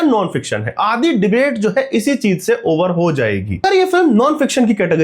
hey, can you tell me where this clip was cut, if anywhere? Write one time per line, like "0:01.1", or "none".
0:03.6